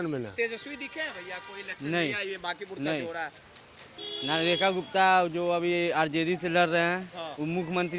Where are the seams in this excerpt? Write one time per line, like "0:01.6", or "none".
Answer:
none